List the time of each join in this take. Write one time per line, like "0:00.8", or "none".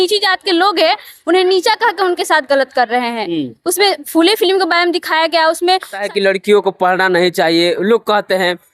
0:06.0